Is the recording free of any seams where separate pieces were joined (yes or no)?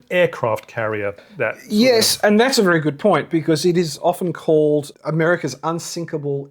no